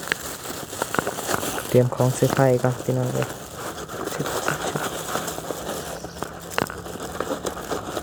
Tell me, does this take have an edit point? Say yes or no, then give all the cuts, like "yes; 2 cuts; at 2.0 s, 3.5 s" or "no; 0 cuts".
no; 0 cuts